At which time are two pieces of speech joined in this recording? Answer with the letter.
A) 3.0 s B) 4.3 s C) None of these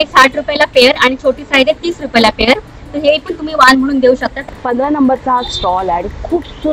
B